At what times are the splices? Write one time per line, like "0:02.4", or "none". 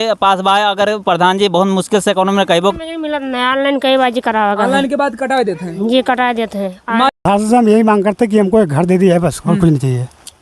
0:02.8
0:07.1